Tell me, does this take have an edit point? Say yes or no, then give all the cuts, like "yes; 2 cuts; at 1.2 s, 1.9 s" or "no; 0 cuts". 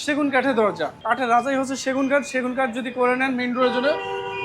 yes; 1 cut; at 1.0 s